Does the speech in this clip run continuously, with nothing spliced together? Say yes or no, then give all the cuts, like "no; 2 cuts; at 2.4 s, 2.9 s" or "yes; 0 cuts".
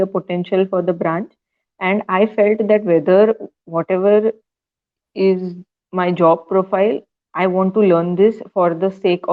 yes; 0 cuts